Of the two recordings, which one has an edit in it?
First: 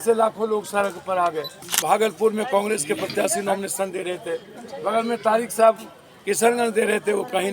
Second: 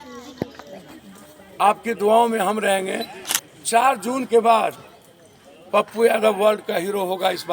first; 1 cut; at 1.6 s

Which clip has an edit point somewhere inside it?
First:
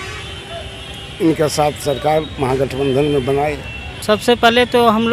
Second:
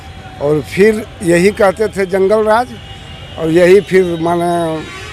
first; 1 cut; at 3.9 s

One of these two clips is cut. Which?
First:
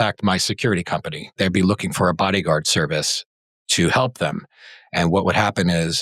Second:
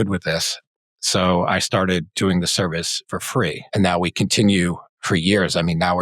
second; 2 cuts; at 3.7 s, 4.9 s

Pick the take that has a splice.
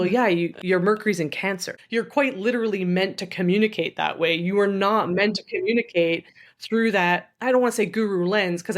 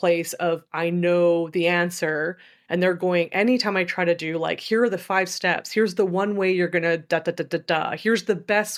first; 1 cut; at 1.7 s

